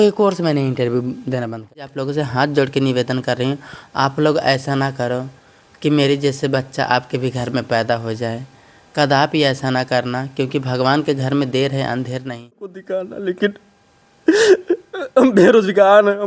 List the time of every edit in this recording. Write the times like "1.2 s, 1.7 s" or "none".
1.8 s, 12.7 s